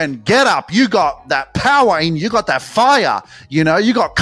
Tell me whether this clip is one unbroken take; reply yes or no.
yes